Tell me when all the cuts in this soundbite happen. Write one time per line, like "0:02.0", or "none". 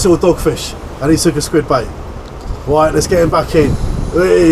none